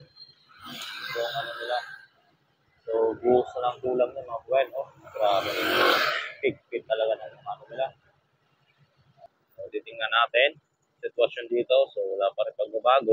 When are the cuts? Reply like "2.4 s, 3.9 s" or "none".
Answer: 9.3 s